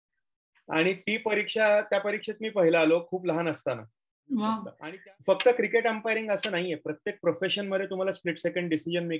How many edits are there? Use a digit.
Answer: 1